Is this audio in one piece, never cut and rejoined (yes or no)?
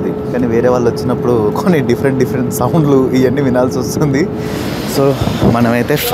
no